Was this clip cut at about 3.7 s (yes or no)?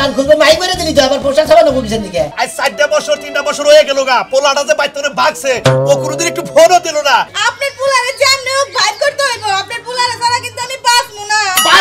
no